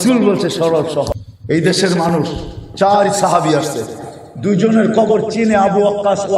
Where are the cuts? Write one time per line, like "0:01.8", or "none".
0:01.3